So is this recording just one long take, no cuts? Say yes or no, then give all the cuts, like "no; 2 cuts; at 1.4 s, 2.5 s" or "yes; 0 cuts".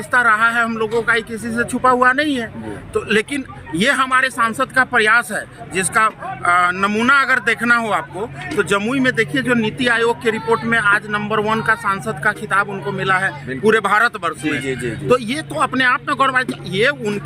yes; 0 cuts